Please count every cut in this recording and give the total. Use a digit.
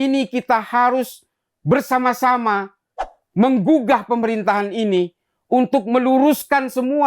0